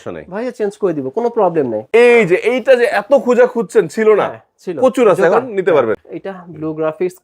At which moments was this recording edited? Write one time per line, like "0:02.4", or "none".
0:01.8
0:06.0

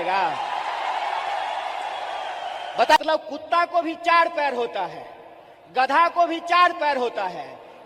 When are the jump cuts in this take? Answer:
0:03.0

